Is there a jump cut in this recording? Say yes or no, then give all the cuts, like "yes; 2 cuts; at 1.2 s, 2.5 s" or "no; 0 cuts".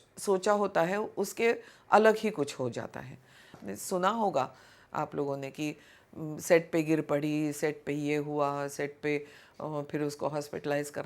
yes; 1 cut; at 3.6 s